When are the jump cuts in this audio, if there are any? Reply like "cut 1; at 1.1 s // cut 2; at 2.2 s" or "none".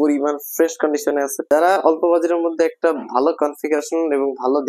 cut 1; at 1.5 s